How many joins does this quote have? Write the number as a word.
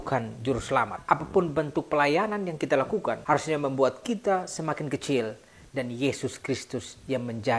one